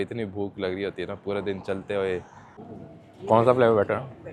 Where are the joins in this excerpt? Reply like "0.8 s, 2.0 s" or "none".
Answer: 2.4 s